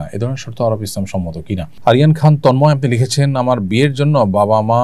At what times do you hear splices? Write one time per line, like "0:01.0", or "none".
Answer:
0:01.7